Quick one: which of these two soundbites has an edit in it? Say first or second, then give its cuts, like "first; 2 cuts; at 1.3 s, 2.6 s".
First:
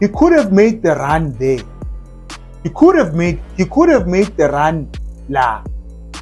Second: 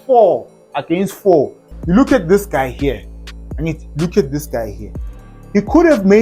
second; 1 cut; at 1.6 s